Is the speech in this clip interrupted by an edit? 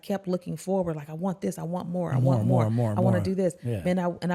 no; 0 cuts

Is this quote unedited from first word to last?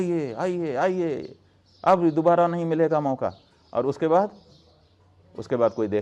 yes; 0 cuts

